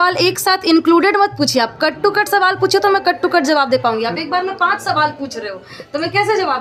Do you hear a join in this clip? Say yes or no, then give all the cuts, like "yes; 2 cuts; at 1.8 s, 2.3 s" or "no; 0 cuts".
no; 0 cuts